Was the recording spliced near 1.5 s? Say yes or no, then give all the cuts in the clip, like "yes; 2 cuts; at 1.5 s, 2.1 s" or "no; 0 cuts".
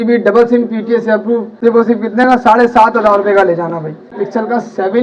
yes; 2 cuts; at 1.5 s, 4.2 s